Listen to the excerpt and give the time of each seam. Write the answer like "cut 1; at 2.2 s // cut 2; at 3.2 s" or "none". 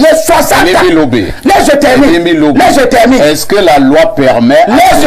none